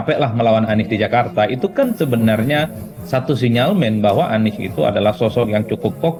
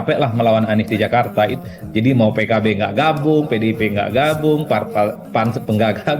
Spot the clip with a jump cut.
second; 1 cut; at 1.6 s

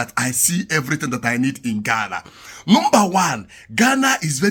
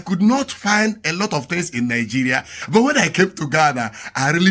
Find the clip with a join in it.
second; 1 cut; at 2.5 s

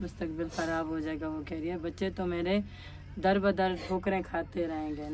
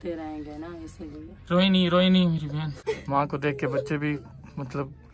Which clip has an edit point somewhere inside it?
second; 1 cut; at 2.7 s

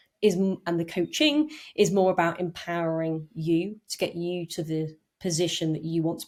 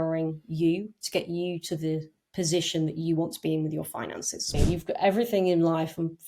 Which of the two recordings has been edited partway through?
second; 1 cut; at 4.5 s

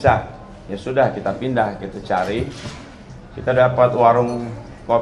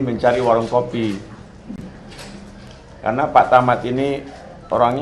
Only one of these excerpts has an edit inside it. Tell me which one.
second; 1 cut; at 2.3 s

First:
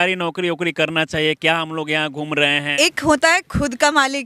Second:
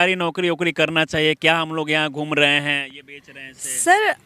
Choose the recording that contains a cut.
first; 1 cut; at 2.7 s

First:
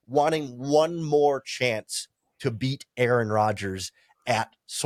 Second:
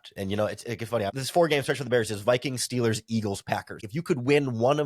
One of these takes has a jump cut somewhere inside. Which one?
second; 2 cuts; at 1.2 s, 3.9 s

